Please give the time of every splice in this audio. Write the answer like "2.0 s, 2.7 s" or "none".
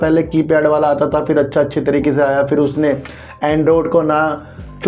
none